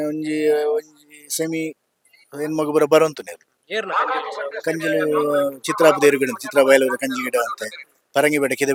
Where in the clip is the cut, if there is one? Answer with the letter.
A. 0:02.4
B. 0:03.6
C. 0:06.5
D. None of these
D